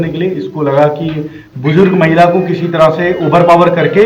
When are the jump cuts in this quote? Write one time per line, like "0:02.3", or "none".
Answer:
none